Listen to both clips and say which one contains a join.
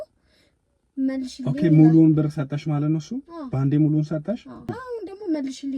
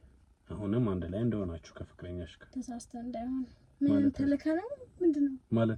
first; 1 cut; at 4.7 s

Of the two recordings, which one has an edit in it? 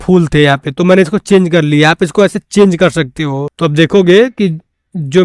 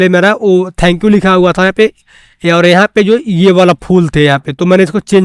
first; 1 cut; at 3.5 s

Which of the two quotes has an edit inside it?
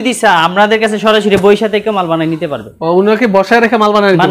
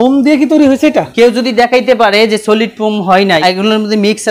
second; 2 cuts; at 1.1 s, 3.4 s

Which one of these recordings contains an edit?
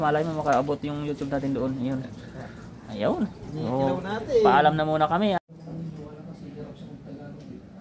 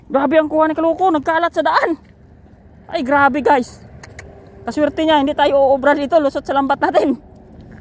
first; 1 cut; at 5.4 s

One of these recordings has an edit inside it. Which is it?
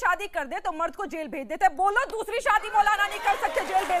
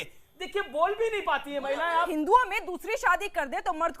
second; 1 cut; at 2.1 s

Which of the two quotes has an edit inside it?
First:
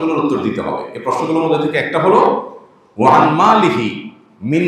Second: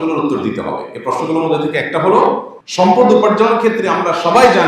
second; 1 cut; at 2.6 s

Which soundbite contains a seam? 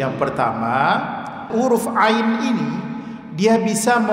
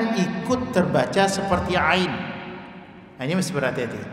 first; 1 cut; at 1.4 s

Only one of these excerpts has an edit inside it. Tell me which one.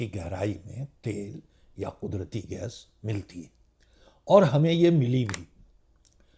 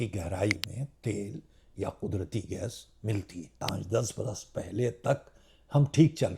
second; 1 cut; at 3.7 s

